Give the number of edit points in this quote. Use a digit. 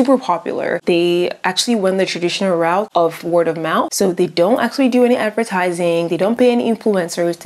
0